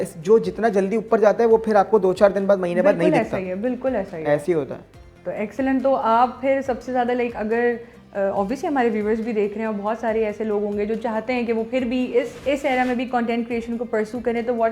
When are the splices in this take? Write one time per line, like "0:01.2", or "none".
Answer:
none